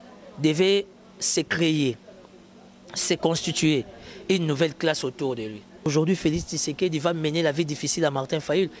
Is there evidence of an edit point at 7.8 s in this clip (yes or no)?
no